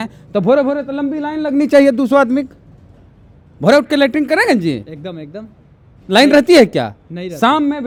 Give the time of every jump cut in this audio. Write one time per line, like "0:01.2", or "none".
none